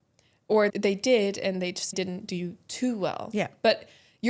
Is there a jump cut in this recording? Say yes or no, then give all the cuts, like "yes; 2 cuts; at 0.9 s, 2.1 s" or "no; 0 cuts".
yes; 2 cuts; at 0.7 s, 1.9 s